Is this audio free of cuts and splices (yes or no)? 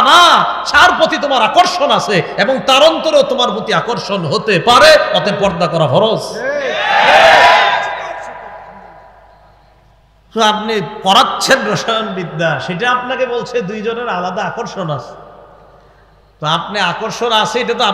yes